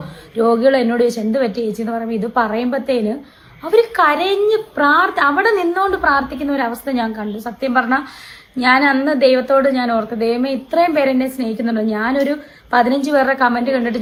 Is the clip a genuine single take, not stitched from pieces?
yes; 0 cuts

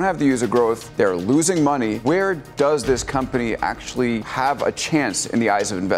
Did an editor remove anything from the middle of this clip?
yes; 3 cuts; at 0.8 s, 2.0 s, 4.3 s

